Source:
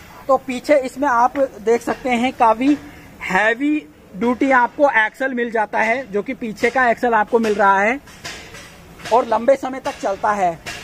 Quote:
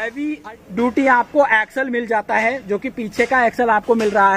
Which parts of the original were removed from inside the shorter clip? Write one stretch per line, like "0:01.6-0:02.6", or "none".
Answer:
none